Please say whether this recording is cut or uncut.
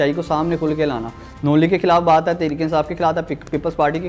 uncut